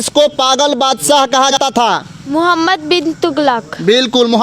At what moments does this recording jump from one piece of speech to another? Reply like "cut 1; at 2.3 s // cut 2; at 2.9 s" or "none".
cut 1; at 1.5 s